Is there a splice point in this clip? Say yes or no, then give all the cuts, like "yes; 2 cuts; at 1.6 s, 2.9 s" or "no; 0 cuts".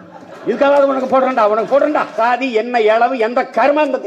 yes; 1 cut; at 2.1 s